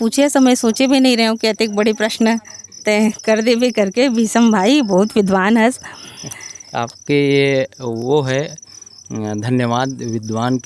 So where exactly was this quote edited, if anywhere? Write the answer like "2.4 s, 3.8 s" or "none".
none